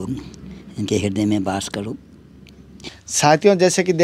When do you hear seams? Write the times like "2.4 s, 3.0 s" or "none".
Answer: 2.9 s

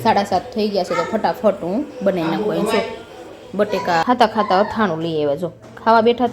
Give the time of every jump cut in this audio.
4.0 s

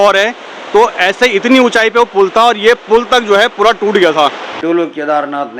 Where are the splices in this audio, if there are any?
4.5 s

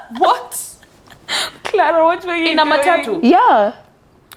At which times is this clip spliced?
none

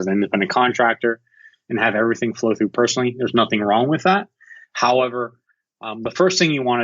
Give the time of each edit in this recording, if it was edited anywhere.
none

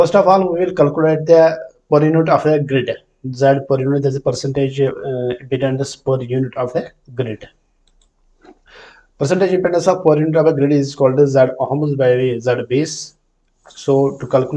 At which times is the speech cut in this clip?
none

